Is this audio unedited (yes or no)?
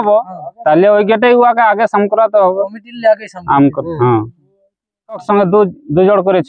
no